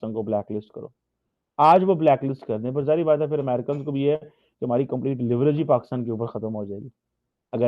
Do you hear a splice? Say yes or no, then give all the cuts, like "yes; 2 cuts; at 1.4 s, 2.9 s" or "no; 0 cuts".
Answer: no; 0 cuts